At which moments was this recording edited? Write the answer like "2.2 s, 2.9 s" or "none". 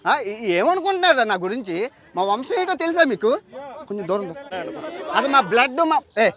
4.5 s